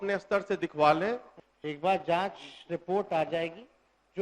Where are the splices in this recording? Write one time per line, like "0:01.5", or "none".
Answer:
0:01.3